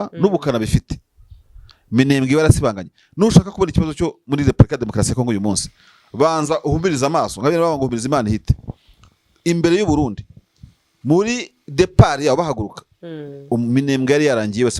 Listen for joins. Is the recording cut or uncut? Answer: uncut